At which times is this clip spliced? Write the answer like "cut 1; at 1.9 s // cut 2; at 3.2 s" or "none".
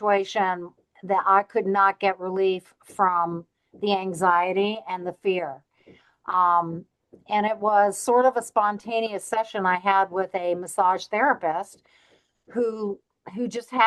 none